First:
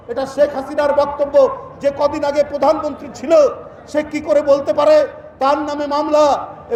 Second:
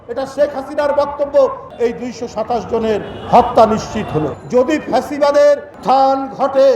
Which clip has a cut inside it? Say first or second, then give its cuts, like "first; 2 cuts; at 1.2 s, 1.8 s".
second; 2 cuts; at 1.6 s, 4.4 s